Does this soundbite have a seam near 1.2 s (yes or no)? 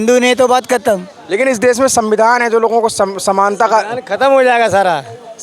yes